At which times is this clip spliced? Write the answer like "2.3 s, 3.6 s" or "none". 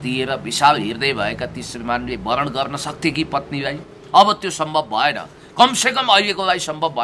none